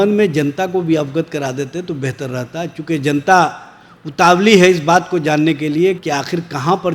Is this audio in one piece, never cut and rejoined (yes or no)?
yes